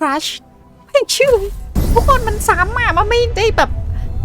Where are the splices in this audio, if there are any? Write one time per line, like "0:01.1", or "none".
0:01.8